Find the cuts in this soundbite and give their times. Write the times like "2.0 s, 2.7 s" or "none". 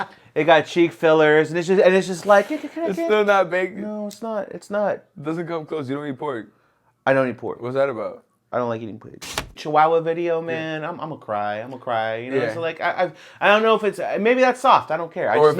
9.5 s